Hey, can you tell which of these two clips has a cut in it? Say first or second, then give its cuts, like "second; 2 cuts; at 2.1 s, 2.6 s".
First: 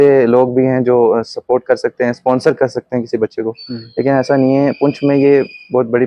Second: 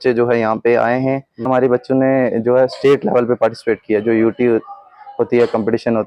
second; 1 cut; at 1.5 s